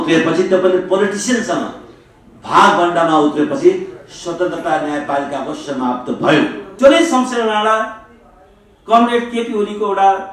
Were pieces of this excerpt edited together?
yes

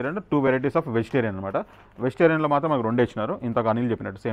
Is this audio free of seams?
yes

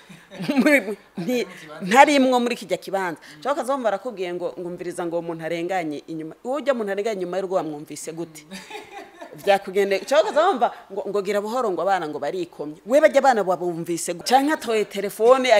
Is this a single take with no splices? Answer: no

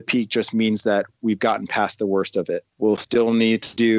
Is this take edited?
no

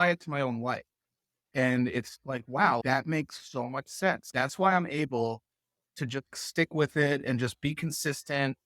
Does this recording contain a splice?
yes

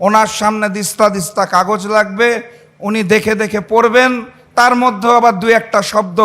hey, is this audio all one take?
yes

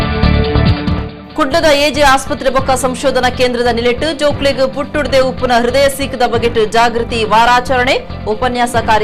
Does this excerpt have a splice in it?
yes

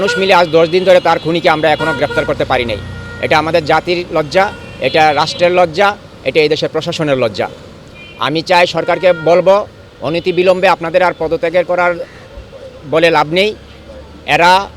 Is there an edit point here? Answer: no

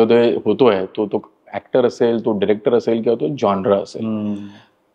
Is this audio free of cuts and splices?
yes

